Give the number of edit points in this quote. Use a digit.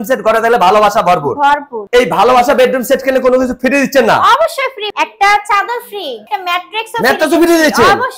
3